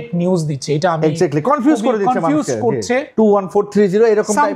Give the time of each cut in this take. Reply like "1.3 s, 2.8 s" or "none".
3.1 s